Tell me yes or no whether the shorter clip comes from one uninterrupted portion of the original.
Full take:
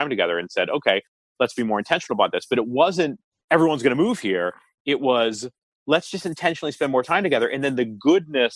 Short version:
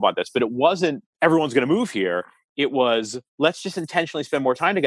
no